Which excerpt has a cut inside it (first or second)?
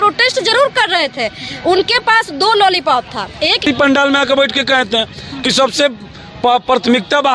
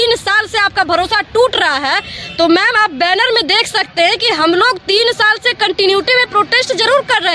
first